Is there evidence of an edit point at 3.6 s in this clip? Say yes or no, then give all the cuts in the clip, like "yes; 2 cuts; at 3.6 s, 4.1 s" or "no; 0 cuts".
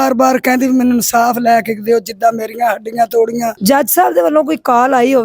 yes; 1 cut; at 3.6 s